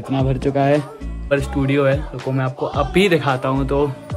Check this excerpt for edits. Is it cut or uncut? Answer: cut